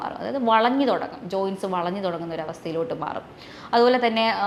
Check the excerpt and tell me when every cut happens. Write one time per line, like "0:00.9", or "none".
none